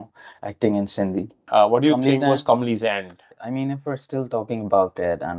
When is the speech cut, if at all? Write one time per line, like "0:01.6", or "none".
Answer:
0:01.4
0:03.3